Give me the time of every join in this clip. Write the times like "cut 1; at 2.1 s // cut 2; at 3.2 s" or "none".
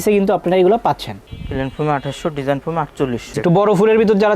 cut 1; at 3.2 s